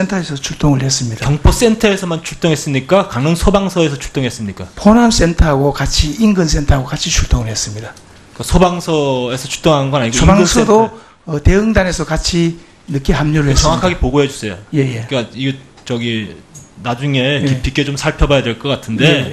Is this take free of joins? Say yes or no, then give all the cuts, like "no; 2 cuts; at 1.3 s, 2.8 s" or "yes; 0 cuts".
no; 1 cut; at 12.2 s